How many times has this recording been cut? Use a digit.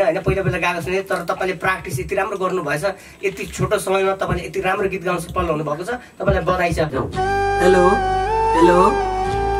1